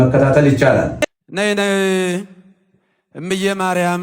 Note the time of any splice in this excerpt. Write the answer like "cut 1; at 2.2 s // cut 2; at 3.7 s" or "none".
cut 1; at 1.0 s